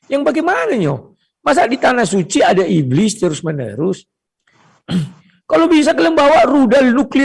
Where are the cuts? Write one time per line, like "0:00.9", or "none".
none